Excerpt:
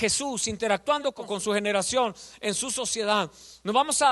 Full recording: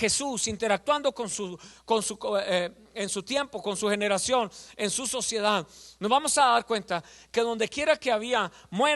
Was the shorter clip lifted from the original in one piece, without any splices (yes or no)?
no